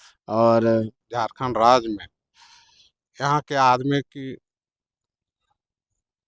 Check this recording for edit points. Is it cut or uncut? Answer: cut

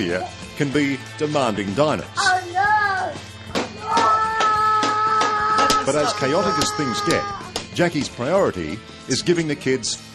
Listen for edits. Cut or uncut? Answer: uncut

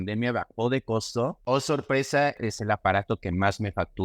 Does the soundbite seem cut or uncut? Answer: cut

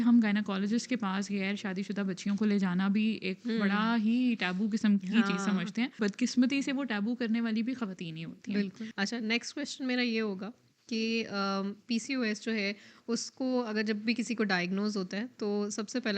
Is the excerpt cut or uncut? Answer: cut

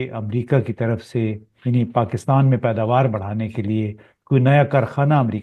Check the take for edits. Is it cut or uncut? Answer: uncut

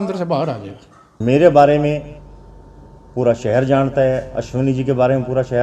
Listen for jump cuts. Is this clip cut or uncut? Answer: cut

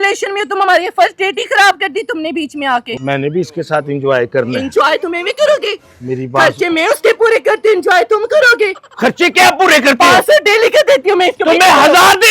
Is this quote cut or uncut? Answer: cut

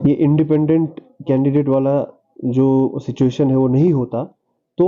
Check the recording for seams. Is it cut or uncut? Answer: uncut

